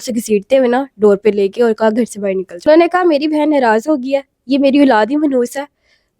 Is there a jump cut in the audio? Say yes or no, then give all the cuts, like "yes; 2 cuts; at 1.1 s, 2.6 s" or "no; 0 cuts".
yes; 1 cut; at 2.6 s